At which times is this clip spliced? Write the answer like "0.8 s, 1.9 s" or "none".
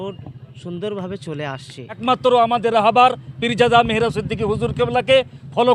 2.0 s